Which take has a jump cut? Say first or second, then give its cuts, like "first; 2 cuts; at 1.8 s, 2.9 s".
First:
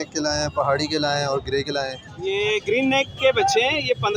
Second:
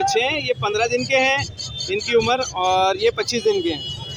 first; 1 cut; at 2.1 s